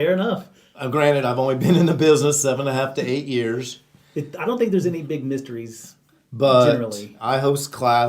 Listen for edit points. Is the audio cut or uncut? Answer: cut